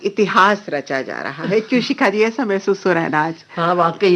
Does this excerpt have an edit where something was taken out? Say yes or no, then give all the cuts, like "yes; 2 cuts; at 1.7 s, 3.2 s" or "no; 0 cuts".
no; 0 cuts